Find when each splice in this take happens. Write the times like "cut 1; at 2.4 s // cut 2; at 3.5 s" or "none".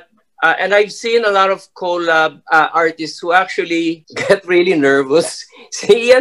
cut 1; at 4.1 s